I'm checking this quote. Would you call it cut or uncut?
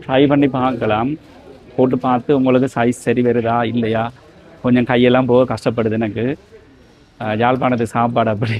uncut